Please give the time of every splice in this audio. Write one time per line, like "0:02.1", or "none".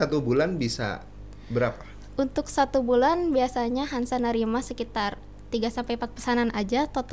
none